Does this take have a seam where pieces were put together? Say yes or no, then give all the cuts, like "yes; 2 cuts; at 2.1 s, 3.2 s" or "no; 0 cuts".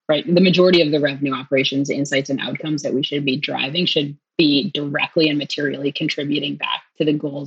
yes; 1 cut; at 4.3 s